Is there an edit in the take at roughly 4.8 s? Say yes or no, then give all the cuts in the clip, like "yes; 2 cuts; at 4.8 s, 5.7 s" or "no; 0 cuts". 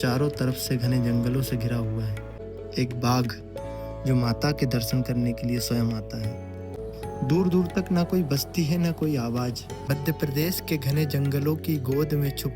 no; 3 cuts; at 2.4 s, 6.7 s, 9.8 s